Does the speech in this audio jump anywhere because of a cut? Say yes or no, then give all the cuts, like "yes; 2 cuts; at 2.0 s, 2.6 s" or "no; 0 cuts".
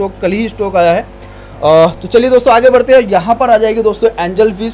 no; 0 cuts